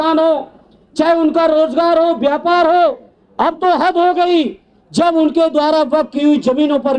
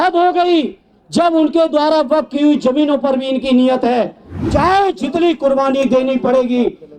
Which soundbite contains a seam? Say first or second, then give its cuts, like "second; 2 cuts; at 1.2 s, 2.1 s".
second; 1 cut; at 4.3 s